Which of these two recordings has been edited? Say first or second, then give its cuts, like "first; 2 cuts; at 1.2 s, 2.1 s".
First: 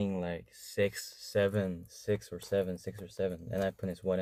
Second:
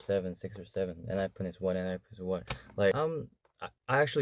second; 1 cut; at 2.9 s